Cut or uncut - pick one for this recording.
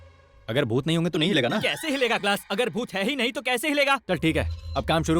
cut